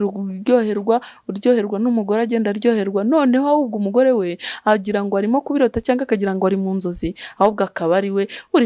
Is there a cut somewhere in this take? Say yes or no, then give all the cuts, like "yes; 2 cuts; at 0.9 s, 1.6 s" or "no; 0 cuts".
no; 0 cuts